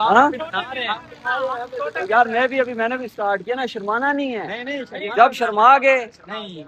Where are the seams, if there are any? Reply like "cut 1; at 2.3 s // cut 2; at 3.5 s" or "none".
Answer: none